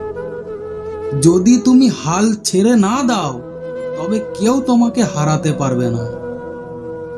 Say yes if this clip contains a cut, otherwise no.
yes